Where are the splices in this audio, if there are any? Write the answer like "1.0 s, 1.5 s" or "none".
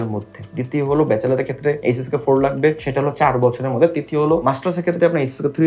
1.8 s, 2.8 s, 4.4 s